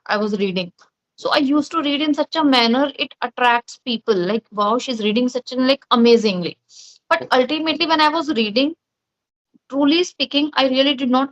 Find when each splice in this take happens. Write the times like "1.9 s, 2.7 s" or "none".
none